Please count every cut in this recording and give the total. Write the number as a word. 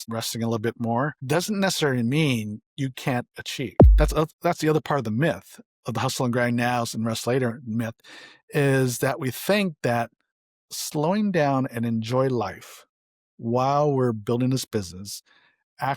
one